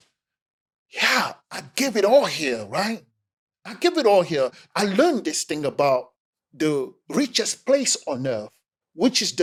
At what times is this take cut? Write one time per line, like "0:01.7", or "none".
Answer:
none